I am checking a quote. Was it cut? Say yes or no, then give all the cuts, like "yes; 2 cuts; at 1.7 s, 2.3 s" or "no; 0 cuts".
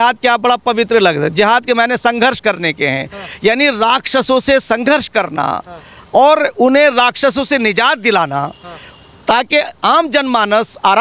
no; 0 cuts